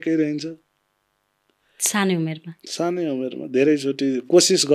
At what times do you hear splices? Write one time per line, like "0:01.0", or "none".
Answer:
none